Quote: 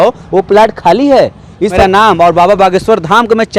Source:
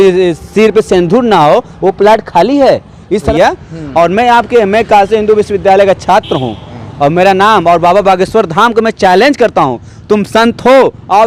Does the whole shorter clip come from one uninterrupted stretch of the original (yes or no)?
no